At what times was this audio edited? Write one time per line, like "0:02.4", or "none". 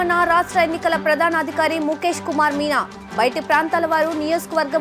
none